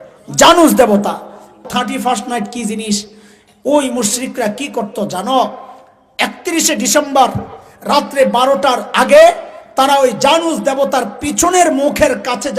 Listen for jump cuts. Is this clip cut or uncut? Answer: cut